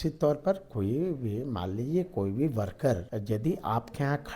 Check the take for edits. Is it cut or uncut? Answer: cut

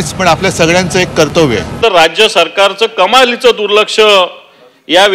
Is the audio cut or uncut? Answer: cut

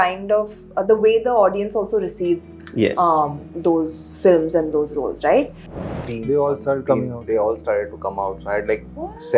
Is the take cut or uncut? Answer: cut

